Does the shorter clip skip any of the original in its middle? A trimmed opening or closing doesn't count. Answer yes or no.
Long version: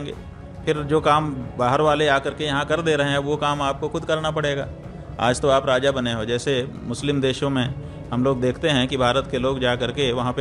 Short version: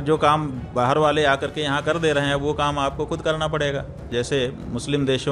yes